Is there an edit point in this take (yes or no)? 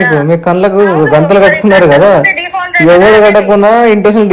no